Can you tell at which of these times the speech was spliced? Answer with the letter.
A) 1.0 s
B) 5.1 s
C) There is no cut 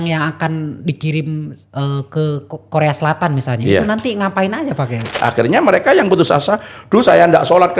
B